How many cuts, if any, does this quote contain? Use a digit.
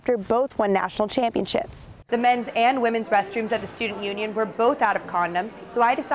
1